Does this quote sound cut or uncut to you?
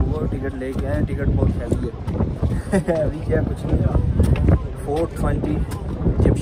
uncut